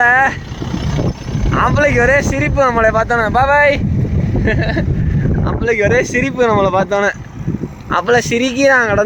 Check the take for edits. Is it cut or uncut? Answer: uncut